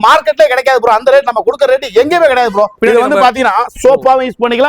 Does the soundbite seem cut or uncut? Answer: cut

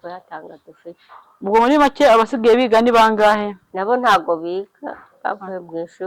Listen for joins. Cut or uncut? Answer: cut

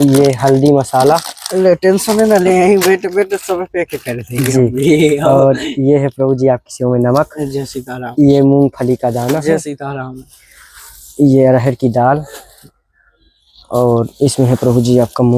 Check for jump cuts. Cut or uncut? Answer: uncut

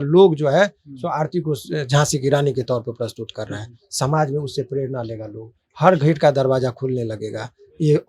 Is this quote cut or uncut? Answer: uncut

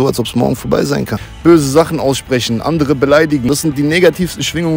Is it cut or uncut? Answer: cut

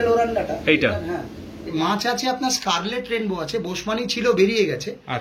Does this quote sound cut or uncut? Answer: cut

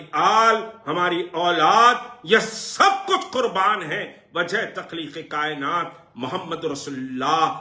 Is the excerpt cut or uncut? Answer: uncut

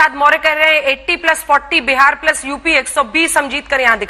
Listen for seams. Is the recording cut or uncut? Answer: uncut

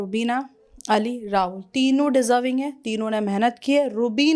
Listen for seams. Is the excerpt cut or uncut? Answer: uncut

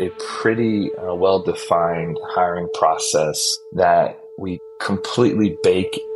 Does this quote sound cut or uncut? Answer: uncut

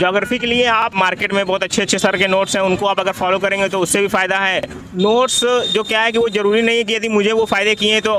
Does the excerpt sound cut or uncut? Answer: cut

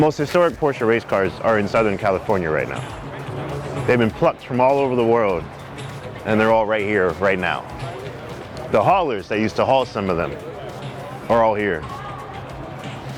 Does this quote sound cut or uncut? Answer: uncut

